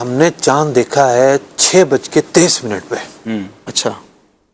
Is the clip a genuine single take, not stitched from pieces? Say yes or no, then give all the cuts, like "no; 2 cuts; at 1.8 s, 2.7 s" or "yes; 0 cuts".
yes; 0 cuts